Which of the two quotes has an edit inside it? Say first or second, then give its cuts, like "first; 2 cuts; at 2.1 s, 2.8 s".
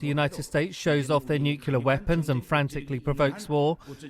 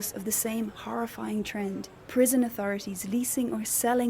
second; 1 cut; at 1.9 s